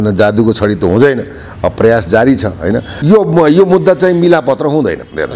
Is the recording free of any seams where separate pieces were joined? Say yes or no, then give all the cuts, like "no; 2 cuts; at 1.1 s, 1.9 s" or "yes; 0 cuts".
no; 1 cut; at 2.9 s